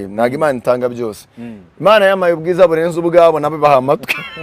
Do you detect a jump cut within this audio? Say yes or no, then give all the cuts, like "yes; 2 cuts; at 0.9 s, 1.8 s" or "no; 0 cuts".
no; 0 cuts